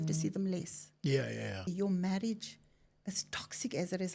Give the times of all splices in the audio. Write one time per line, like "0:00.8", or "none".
0:01.7